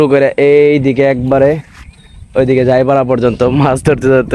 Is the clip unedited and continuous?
yes; 0 cuts

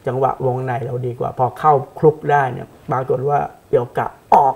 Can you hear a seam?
no; 0 cuts

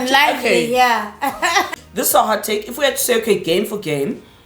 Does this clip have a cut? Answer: yes; 1 cut; at 1.8 s

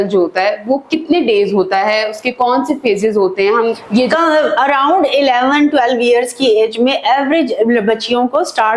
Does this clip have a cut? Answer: yes; 1 cut; at 4.1 s

